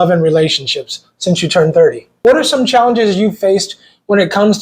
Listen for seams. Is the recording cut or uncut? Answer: cut